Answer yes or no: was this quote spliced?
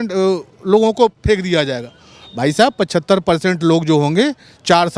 no